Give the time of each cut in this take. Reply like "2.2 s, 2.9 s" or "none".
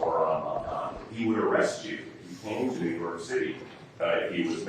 1.0 s

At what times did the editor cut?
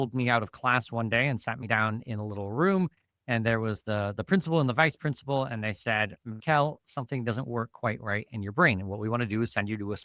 none

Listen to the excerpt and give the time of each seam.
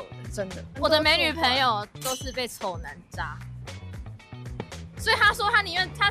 none

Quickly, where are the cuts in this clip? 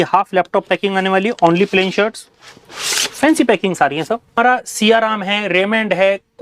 4.4 s

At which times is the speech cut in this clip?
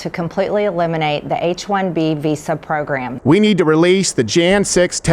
3.1 s

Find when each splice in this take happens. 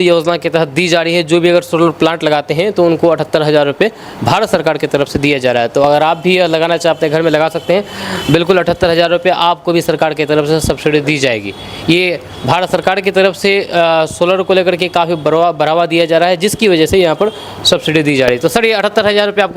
none

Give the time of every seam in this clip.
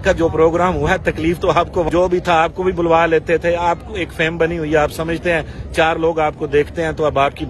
1.9 s

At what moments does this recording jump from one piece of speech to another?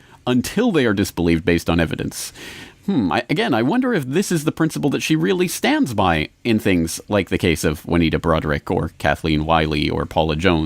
4.8 s

